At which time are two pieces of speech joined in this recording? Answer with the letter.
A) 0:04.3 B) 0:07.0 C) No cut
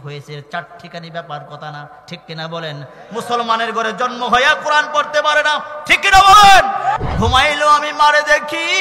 B